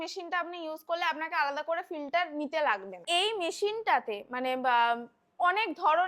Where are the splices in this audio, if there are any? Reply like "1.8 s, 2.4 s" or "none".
3.0 s